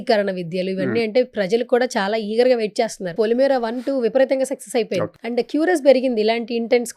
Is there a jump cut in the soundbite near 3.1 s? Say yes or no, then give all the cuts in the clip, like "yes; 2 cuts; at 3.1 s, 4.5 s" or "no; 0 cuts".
yes; 2 cuts; at 3.1 s, 5.2 s